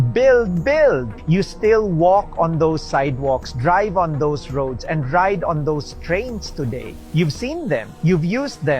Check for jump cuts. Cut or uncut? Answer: cut